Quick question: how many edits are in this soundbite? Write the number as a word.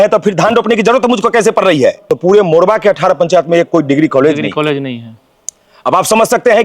one